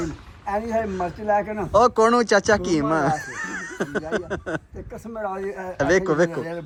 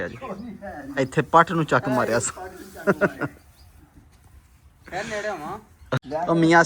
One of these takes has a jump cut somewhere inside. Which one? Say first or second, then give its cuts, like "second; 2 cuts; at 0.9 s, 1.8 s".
second; 1 cut; at 5.7 s